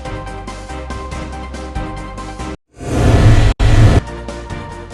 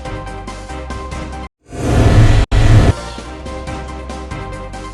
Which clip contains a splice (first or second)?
second